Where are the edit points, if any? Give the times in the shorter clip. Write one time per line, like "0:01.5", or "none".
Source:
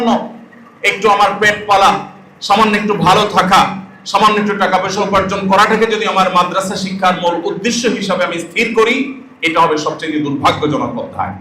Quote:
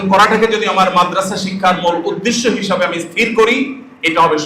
none